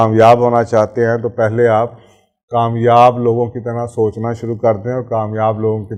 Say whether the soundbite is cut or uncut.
uncut